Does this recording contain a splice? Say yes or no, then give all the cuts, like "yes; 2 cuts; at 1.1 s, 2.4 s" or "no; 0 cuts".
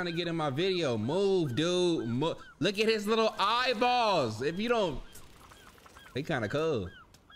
no; 0 cuts